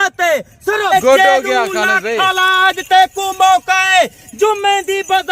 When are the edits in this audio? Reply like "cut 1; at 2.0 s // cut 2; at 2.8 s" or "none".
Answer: cut 1; at 0.9 s